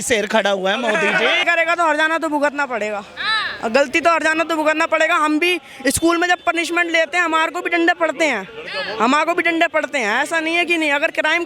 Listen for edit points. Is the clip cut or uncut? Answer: cut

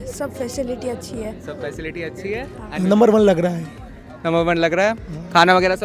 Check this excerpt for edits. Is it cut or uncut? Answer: cut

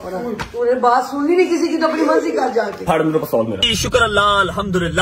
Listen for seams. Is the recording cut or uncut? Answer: cut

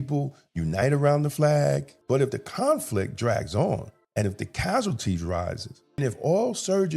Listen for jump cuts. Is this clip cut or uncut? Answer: cut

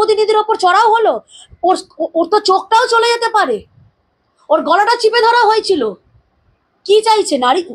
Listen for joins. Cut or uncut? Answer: uncut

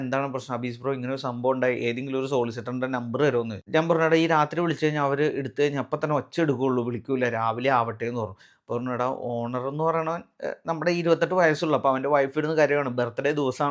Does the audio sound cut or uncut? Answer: cut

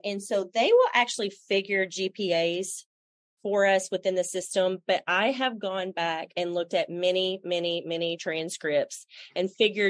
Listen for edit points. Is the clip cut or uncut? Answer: uncut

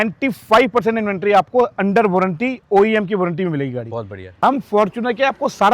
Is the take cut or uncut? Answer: cut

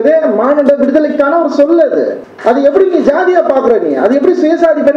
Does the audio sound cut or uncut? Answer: cut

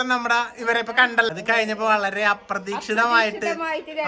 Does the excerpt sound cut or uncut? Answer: cut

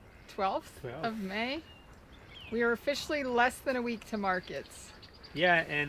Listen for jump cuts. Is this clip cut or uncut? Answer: uncut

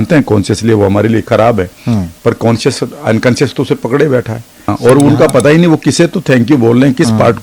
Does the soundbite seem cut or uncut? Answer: cut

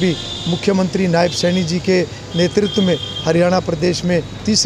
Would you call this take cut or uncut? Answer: uncut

